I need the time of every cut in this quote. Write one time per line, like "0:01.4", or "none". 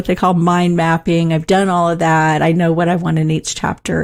none